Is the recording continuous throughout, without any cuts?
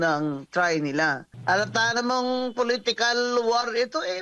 no; 1 cut; at 1.3 s

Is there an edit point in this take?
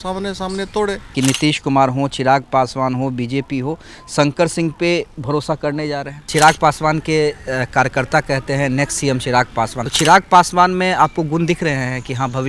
yes; 3 cuts; at 1.1 s, 6.3 s, 9.8 s

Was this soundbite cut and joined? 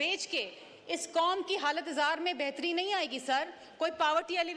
no; 0 cuts

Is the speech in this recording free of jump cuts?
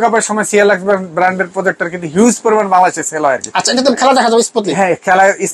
yes; 0 cuts

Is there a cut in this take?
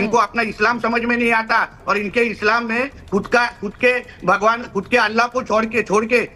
no; 0 cuts

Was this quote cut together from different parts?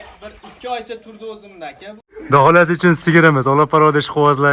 yes; 1 cut; at 1.9 s

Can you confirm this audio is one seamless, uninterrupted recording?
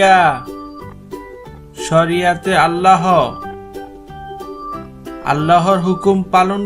yes; 0 cuts

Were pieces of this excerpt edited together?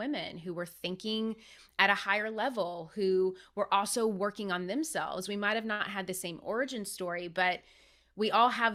no; 0 cuts

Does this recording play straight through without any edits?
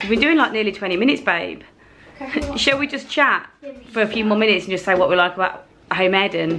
yes; 0 cuts

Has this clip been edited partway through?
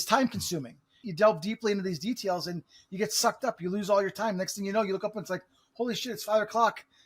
yes; 1 cut; at 1.0 s

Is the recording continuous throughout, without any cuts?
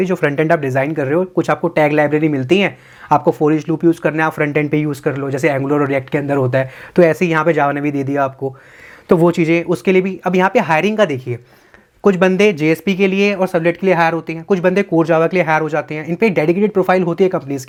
yes; 0 cuts

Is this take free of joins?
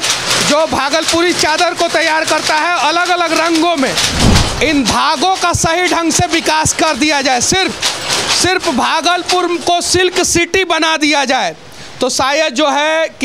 no; 1 cut; at 4.1 s

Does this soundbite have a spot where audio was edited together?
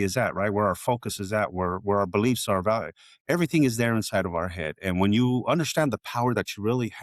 no; 0 cuts

